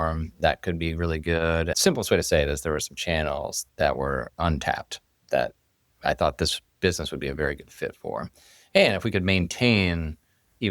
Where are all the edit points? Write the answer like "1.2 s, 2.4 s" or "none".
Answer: 1.7 s